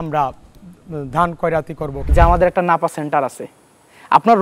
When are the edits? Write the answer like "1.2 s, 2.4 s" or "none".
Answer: 1.9 s